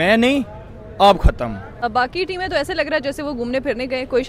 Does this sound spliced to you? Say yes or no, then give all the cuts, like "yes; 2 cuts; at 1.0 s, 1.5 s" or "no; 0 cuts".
yes; 1 cut; at 1.8 s